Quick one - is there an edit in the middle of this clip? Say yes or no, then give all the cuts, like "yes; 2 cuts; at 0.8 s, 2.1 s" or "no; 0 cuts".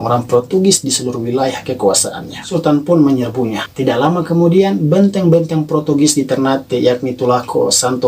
yes; 2 cuts; at 2.3 s, 3.6 s